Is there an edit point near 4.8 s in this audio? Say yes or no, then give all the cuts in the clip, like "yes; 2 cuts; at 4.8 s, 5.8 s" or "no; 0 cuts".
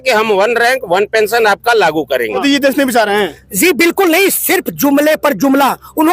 no; 1 cut; at 2.4 s